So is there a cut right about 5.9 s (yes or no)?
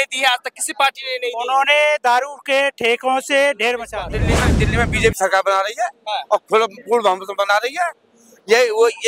no